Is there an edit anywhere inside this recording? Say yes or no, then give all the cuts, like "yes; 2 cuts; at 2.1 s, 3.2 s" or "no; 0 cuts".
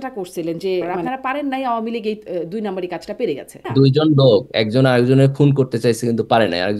yes; 2 cuts; at 1.0 s, 3.6 s